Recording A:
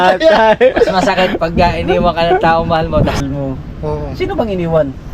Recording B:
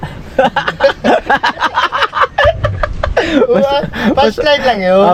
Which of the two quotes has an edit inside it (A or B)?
A